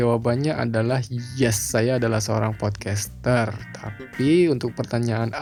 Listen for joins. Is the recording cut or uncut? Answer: uncut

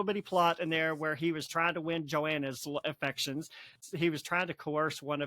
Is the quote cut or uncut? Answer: cut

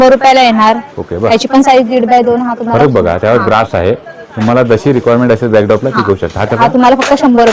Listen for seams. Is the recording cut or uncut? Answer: uncut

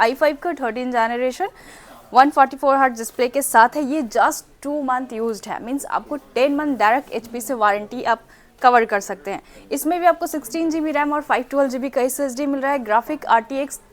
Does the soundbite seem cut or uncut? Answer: uncut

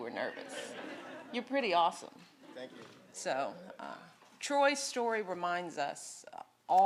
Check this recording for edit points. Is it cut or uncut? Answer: uncut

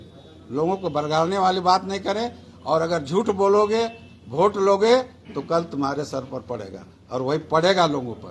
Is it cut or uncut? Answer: uncut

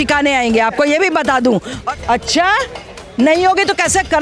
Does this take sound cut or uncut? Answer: cut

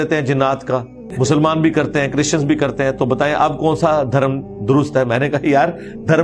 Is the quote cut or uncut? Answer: cut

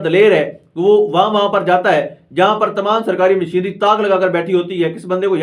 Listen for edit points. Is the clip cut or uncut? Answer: uncut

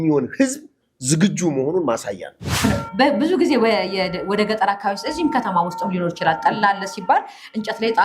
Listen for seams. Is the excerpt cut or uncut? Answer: cut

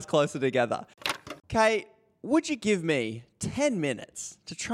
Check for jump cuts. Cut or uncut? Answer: cut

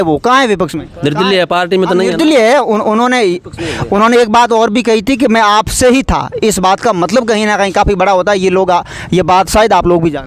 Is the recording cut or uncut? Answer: uncut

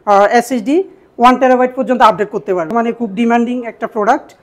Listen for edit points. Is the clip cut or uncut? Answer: cut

